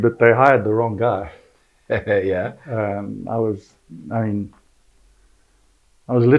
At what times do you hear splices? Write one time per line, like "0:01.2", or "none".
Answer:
none

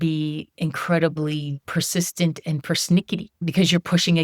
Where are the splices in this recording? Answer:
0:01.6
0:03.3

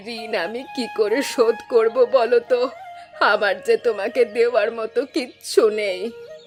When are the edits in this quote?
none

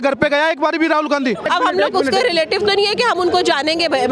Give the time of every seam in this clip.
0:01.5

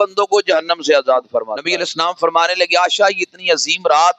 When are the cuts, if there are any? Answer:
0:01.6

